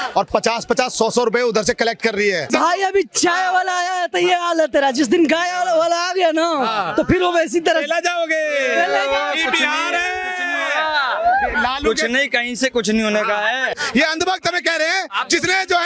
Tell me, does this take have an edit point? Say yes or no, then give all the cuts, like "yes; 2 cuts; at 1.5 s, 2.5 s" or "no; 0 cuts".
yes; 2 cuts; at 2.5 s, 13.7 s